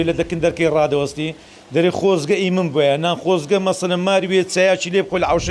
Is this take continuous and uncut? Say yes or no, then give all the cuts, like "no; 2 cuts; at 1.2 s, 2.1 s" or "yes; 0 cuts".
yes; 0 cuts